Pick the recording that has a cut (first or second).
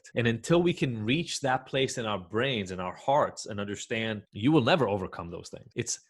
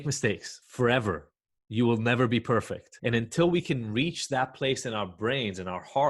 first